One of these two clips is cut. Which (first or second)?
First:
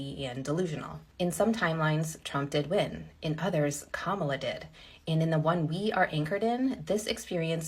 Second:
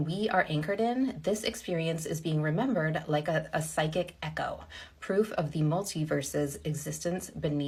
first